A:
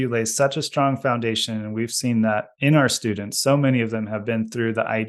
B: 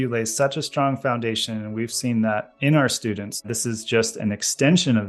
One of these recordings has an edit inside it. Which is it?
B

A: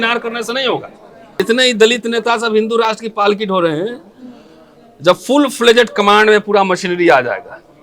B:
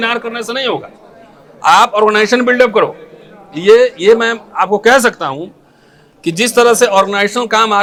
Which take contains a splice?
A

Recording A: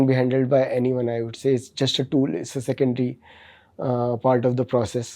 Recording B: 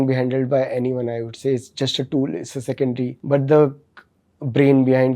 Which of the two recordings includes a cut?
B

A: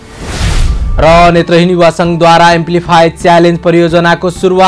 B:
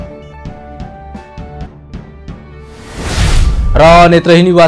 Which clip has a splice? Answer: B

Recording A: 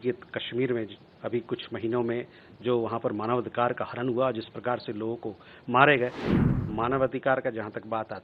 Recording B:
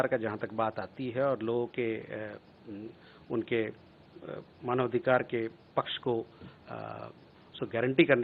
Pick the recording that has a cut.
A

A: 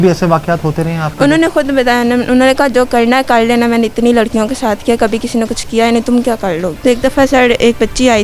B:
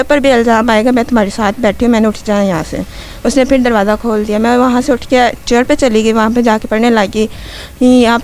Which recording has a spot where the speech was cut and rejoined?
A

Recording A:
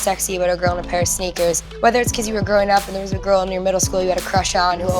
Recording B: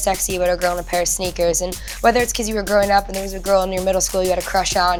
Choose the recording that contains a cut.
A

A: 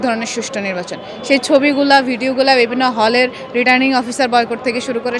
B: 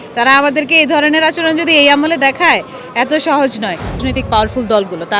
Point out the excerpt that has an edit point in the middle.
B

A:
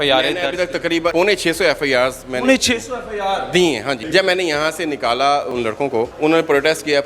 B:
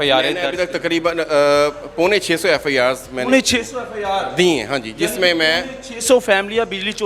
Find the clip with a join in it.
A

